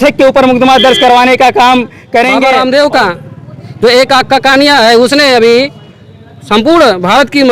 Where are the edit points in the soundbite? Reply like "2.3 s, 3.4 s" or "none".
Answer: 2.4 s